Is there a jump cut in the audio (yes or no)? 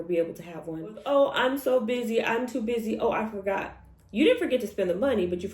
yes